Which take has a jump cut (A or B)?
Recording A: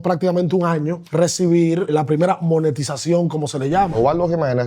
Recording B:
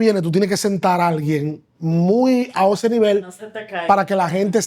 A